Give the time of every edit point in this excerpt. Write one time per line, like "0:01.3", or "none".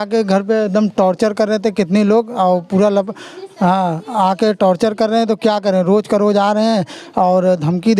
none